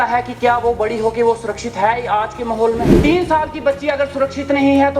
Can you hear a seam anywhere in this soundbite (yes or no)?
yes